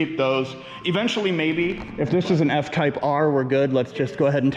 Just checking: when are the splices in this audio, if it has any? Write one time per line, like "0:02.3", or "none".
0:01.8